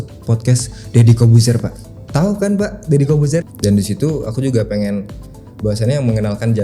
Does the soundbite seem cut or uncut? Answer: cut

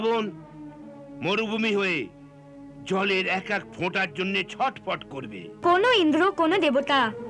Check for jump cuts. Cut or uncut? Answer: cut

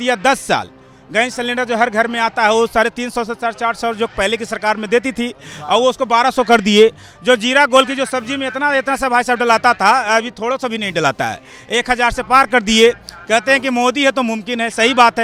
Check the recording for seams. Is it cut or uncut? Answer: uncut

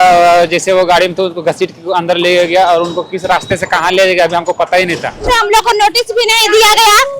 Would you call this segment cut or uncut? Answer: cut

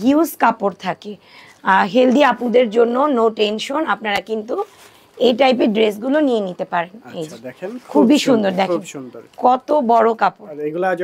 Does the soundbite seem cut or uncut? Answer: uncut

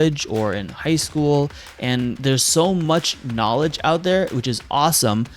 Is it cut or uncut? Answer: cut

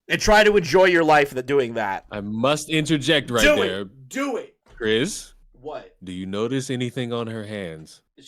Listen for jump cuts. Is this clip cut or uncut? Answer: uncut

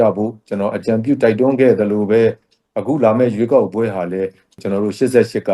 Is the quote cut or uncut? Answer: cut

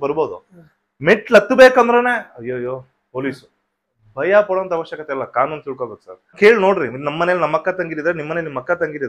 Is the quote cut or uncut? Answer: cut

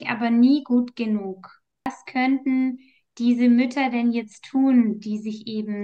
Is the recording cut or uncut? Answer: cut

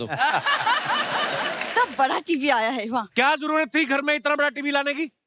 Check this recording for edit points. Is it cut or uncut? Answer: cut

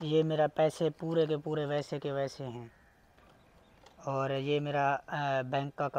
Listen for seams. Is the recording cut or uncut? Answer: uncut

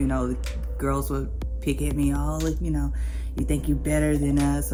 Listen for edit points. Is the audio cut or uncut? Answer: uncut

